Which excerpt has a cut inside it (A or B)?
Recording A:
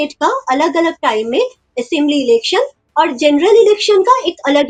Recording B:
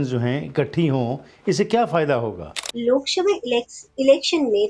B